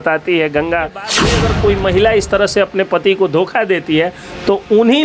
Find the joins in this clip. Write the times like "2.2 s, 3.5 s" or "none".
1.1 s